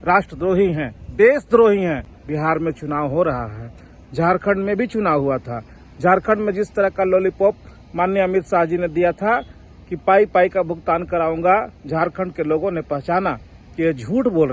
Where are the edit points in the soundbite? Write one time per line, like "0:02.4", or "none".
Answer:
0:02.2